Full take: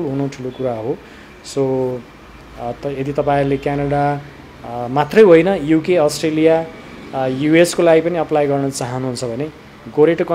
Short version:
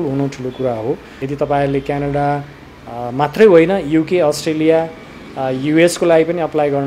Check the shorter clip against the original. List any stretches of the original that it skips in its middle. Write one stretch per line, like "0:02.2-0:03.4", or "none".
0:01.2-0:03.0

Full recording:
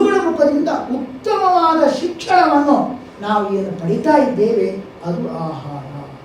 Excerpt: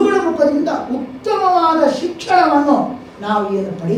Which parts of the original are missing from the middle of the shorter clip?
none

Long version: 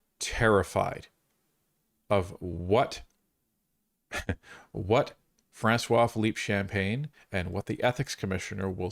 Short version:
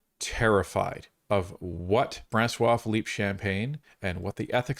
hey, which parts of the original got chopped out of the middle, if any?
0:01.1-0:01.9
0:03.0-0:05.5

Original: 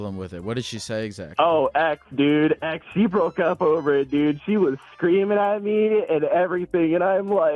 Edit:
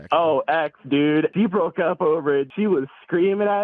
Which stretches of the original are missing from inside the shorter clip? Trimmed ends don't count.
0:02.6-0:02.9
0:04.1-0:04.4

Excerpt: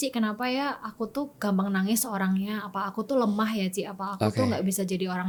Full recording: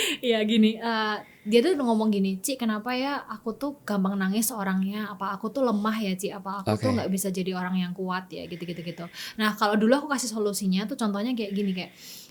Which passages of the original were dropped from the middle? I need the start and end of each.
none

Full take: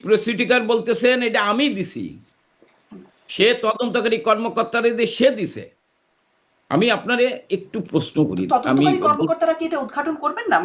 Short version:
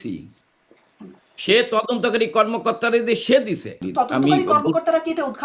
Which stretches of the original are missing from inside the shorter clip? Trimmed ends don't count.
0:05.7-0:08.4

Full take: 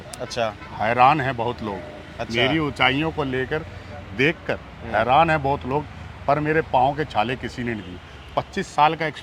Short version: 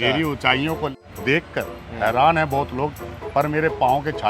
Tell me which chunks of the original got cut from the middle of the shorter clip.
0:03.3-0:03.9

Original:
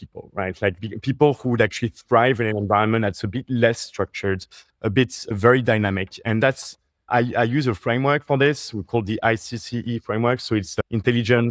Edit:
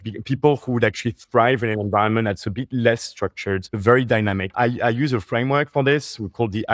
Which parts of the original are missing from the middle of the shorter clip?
0:04.5-0:05.3
0:06.0-0:07.0

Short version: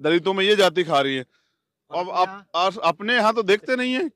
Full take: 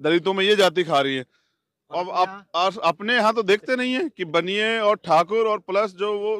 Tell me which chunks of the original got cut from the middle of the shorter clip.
none

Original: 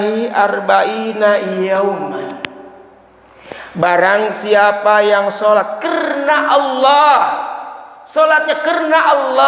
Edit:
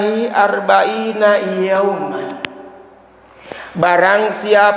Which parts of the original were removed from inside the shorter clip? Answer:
none

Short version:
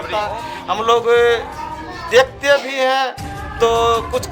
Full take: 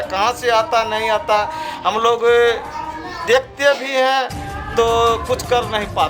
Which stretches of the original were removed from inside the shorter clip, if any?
none

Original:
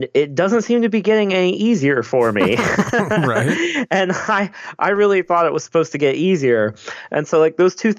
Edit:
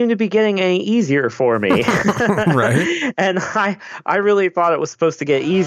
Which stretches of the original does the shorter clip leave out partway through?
none

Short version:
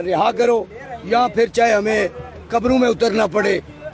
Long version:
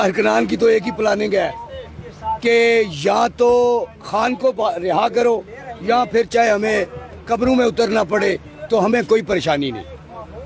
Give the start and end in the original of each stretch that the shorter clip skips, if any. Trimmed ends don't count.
none

